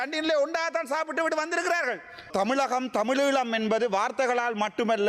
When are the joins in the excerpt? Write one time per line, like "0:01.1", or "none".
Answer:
0:02.3